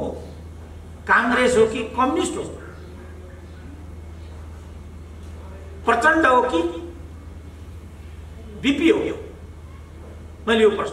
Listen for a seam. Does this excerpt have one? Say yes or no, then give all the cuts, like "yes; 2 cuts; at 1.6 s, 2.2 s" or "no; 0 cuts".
no; 0 cuts